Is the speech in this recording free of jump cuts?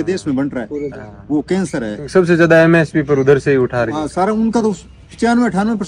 yes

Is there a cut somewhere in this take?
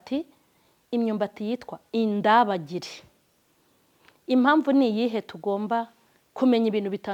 no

